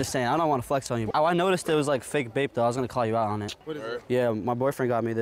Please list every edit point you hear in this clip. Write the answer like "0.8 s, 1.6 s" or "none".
1.1 s, 3.5 s